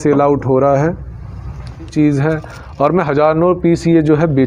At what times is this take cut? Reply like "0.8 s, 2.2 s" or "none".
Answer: 1.9 s

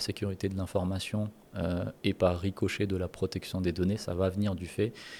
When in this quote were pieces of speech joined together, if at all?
none

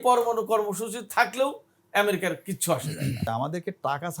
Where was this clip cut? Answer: 3.3 s

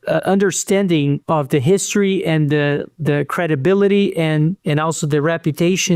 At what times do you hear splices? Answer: 1.2 s

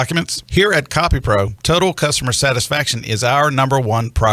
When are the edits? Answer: none

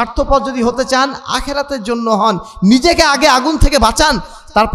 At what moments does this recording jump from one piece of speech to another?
none

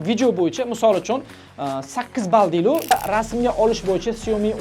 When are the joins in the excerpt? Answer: 2.9 s

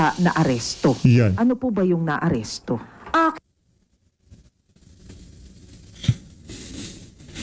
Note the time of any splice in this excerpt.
none

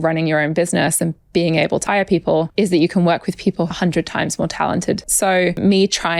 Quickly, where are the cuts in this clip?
2.2 s, 3.7 s, 5.5 s

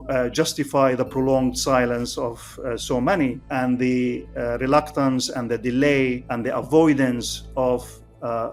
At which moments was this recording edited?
3.4 s, 6.3 s

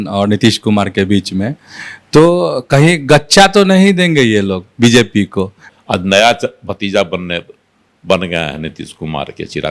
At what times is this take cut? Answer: 5.6 s

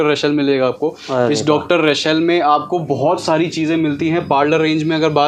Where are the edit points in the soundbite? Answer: none

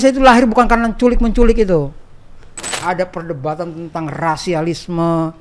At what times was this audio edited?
2.7 s

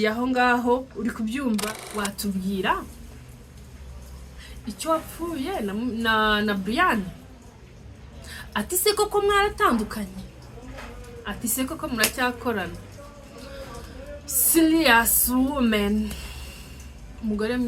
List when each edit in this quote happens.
1.8 s

